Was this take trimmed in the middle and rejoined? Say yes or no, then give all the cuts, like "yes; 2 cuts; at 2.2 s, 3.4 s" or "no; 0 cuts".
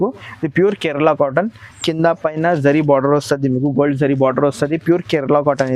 no; 0 cuts